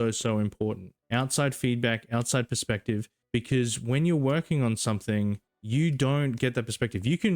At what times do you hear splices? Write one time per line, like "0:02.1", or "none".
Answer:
0:00.9
0:03.1
0:05.5